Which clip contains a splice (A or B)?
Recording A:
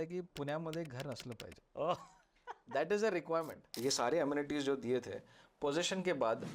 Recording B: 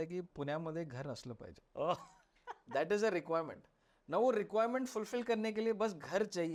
A